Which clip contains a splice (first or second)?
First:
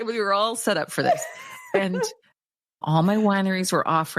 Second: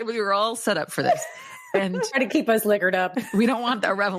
second